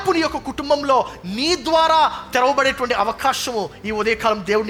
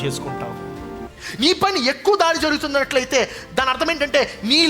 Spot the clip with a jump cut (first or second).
second